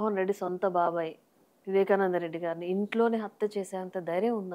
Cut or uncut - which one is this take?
uncut